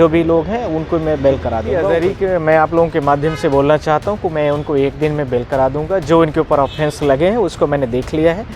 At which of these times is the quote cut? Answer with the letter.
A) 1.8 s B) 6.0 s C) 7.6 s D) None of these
A